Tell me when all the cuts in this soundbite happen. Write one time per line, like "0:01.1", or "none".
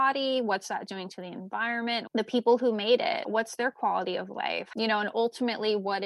0:02.1
0:04.7

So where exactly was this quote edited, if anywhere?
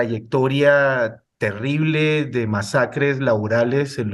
none

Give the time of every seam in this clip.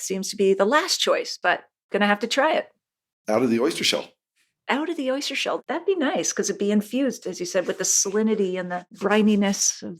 0:01.7
0:08.8

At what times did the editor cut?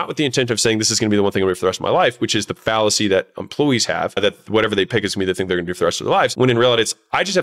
0:04.2
0:06.3

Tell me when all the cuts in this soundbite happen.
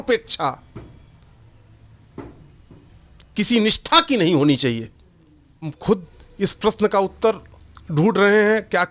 0:05.8

